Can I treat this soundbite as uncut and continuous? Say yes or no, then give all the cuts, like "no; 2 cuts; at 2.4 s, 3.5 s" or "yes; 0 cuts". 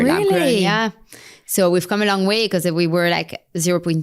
yes; 0 cuts